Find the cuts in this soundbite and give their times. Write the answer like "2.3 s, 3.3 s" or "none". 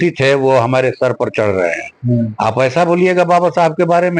none